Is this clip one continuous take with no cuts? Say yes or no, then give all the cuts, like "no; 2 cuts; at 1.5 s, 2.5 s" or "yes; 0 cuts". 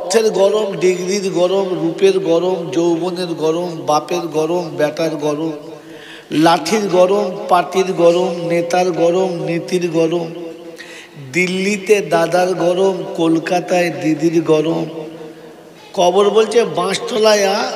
yes; 0 cuts